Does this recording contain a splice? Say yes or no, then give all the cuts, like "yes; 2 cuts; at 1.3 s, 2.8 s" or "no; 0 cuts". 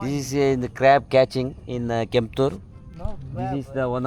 no; 0 cuts